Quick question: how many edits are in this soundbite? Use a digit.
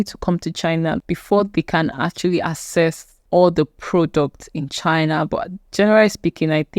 2